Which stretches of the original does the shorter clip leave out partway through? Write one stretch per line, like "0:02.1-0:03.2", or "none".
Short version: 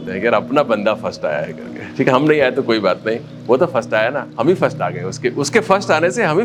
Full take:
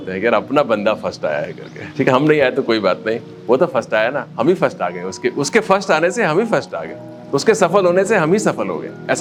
none